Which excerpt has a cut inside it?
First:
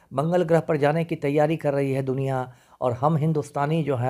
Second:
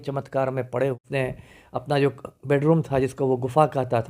second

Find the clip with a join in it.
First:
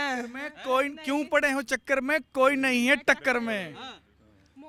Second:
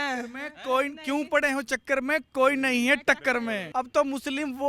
second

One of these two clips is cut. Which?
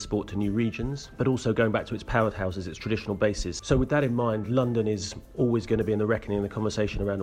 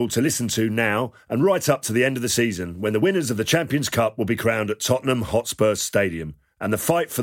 first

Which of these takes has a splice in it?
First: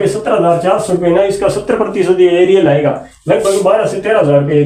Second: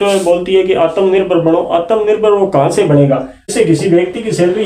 second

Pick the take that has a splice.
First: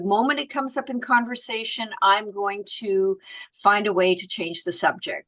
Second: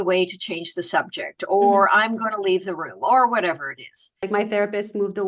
second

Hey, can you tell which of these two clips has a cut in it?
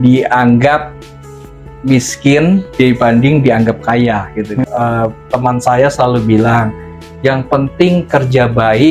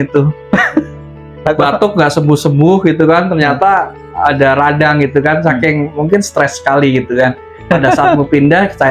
first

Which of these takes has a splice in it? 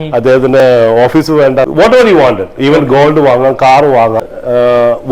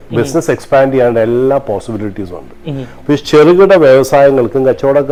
first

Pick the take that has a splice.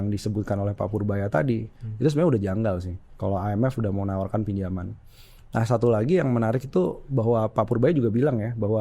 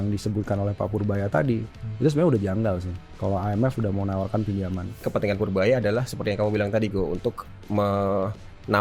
second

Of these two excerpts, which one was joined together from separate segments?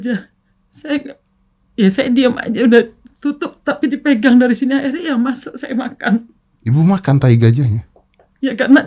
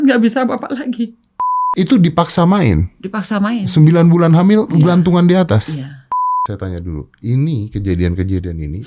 second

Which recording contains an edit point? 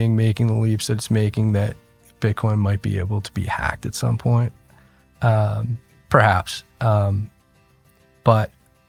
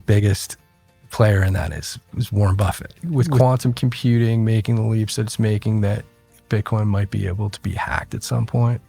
second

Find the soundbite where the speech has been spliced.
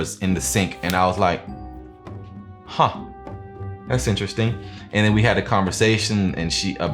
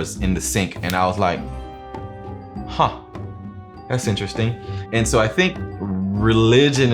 second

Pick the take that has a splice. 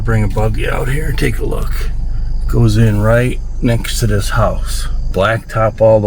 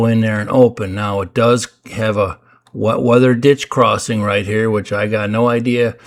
first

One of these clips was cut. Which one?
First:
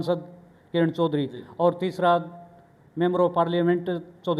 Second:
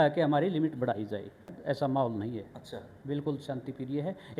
second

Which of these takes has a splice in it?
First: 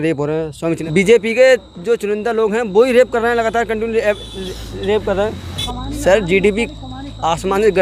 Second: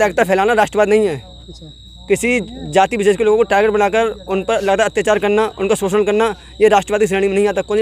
first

